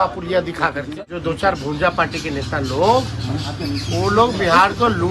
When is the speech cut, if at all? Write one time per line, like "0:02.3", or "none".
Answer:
0:00.9